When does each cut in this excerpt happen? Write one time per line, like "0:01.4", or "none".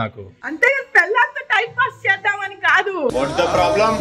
none